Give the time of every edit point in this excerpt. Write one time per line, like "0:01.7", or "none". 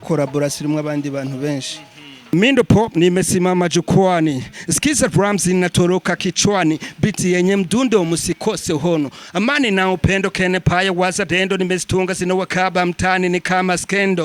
0:02.2